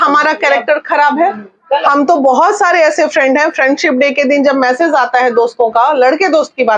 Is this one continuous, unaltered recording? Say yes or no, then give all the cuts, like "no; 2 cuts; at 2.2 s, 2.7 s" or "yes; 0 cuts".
yes; 0 cuts